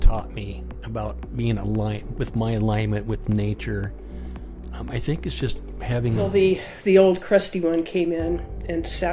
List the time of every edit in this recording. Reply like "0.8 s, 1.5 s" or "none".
6.3 s